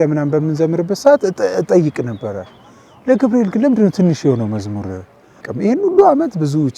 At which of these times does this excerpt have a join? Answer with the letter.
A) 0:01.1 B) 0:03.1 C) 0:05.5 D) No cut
C